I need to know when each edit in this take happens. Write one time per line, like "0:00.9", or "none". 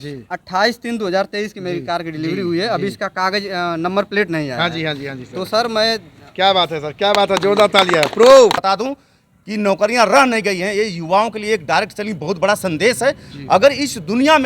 0:08.6